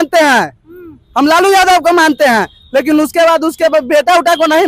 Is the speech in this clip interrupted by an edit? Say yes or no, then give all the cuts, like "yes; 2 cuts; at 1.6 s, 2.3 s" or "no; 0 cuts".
no; 0 cuts